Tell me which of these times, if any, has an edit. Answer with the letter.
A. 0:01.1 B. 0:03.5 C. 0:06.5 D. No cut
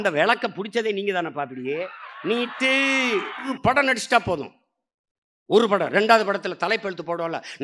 B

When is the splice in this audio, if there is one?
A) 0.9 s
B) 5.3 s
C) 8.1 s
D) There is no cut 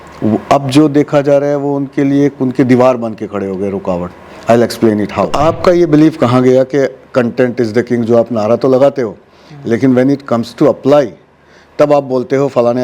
B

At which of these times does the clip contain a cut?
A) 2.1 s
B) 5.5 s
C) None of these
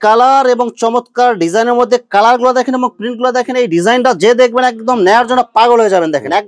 C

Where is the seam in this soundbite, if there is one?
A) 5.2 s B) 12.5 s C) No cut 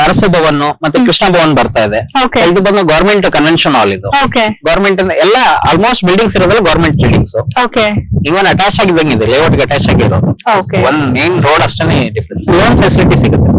B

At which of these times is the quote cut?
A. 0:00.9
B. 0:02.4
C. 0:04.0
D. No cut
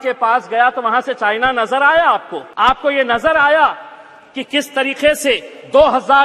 B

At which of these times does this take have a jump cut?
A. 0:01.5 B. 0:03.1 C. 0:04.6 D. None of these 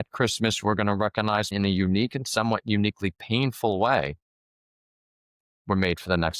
A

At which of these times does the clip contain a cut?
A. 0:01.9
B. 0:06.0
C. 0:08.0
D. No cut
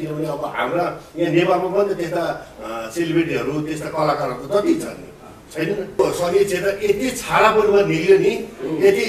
B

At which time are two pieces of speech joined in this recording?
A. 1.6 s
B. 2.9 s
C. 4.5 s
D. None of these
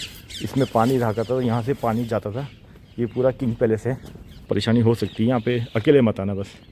C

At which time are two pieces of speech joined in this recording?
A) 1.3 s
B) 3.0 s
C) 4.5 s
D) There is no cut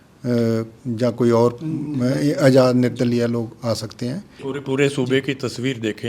C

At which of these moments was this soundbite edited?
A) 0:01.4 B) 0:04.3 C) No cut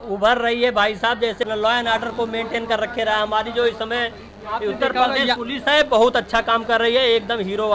A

